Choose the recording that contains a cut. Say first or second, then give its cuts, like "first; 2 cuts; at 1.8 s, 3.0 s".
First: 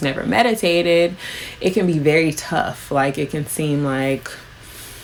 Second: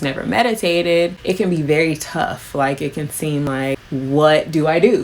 second; 2 cuts; at 1.2 s, 3.5 s